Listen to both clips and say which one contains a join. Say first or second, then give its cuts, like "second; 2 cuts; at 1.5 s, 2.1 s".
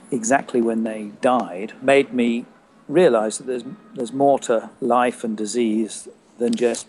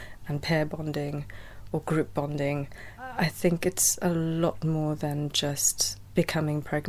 first; 2 cuts; at 1.8 s, 4.7 s